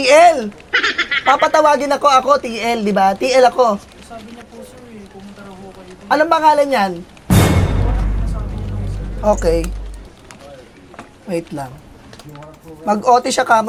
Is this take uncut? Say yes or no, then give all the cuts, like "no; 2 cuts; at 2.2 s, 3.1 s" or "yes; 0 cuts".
yes; 0 cuts